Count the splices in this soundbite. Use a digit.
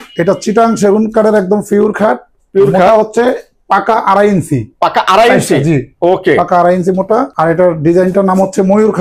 0